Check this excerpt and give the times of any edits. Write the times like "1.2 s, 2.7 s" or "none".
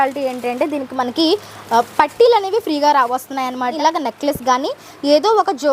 3.7 s